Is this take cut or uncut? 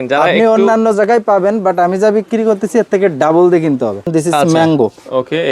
cut